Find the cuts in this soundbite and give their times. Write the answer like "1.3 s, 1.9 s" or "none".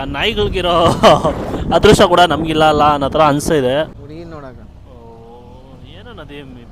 3.9 s